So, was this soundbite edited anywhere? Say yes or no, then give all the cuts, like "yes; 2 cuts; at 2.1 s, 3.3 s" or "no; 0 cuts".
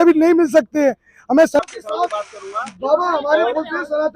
yes; 1 cut; at 1.6 s